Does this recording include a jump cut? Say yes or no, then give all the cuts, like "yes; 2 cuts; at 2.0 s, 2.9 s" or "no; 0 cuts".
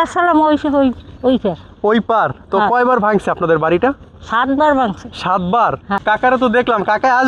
yes; 1 cut; at 6.0 s